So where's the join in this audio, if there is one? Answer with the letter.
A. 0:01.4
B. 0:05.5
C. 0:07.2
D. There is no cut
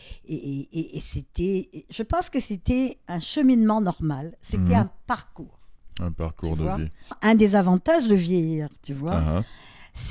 C